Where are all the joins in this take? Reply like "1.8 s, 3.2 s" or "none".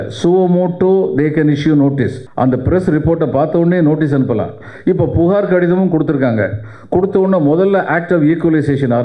2.2 s